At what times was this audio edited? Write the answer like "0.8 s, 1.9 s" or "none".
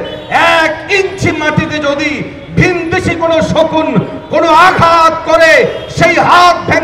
none